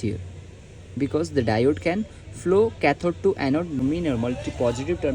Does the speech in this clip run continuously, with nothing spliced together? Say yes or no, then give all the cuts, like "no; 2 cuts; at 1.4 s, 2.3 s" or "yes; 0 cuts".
no; 1 cut; at 3.8 s